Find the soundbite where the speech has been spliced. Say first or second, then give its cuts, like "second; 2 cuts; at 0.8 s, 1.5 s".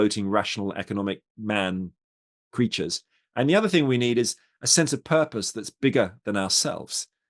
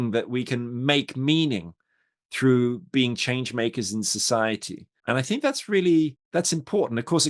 second; 2 cuts; at 4.9 s, 6.2 s